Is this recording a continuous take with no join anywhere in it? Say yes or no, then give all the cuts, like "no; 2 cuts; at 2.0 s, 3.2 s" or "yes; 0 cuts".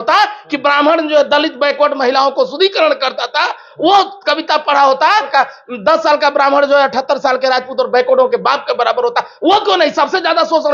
no; 1 cut; at 5.3 s